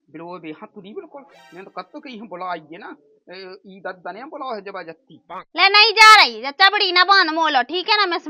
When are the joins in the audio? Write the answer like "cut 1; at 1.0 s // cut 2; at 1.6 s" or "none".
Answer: none